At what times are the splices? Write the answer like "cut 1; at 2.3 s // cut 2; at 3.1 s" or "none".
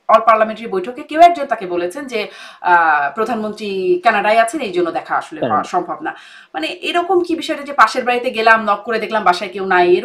none